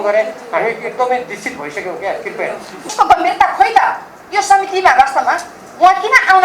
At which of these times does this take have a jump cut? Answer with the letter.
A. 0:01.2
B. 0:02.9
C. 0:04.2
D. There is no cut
B